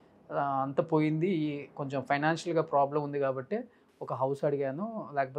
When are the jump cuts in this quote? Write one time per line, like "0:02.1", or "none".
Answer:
none